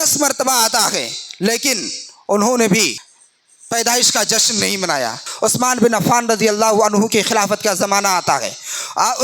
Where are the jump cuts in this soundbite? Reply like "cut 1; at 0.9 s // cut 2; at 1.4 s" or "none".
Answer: cut 1; at 3.0 s // cut 2; at 5.2 s